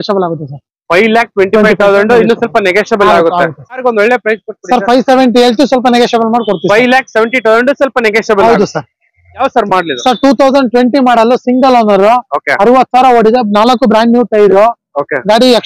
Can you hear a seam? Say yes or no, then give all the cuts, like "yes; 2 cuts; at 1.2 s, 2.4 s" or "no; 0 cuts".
yes; 2 cuts; at 3.8 s, 9.4 s